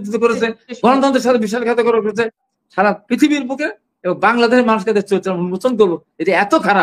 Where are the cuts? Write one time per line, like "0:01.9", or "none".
0:02.4

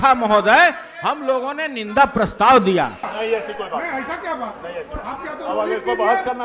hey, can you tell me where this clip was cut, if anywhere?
0:03.1

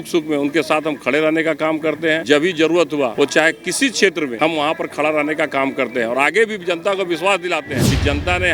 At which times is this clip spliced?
none

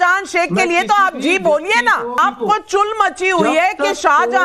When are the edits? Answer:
0:02.2

